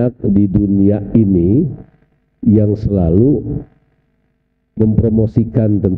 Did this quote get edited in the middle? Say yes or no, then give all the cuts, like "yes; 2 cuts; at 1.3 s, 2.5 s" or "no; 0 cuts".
no; 0 cuts